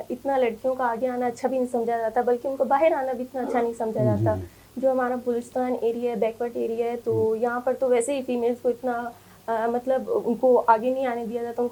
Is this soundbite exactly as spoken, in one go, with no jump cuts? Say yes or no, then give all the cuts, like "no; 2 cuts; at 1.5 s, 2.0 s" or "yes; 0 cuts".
yes; 0 cuts